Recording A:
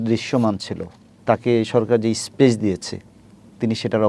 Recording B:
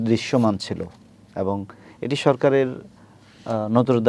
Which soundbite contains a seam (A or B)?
A